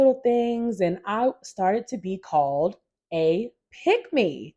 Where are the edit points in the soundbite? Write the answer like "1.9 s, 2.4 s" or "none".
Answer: none